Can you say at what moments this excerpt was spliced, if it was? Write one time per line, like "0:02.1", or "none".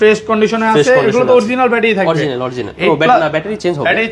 none